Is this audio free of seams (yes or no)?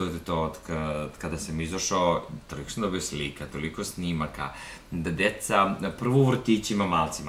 yes